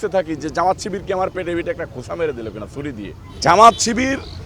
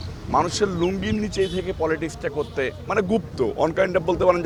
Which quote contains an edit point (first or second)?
first